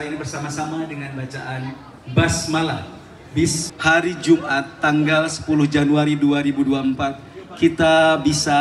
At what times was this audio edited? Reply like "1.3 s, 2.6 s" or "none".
3.7 s